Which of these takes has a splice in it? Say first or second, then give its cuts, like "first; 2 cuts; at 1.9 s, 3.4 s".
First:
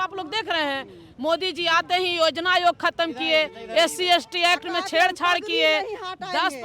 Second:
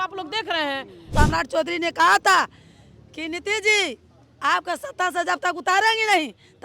second; 1 cut; at 1.0 s